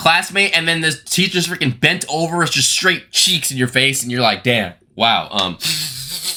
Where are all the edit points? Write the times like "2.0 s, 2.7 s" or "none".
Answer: none